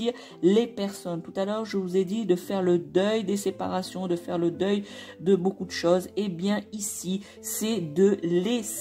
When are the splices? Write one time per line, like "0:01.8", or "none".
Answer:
none